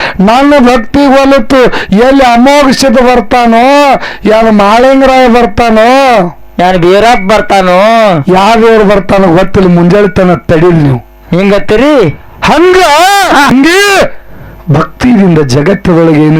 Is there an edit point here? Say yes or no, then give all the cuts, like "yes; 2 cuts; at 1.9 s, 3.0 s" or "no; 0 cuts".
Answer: yes; 1 cut; at 13.5 s